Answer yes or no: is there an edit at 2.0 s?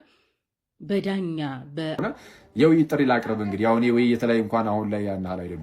yes